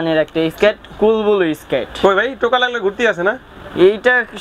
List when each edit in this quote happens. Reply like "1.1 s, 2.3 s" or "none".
none